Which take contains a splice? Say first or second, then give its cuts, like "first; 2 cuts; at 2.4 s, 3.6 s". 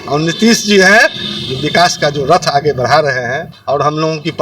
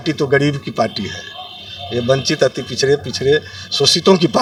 first; 1 cut; at 3.5 s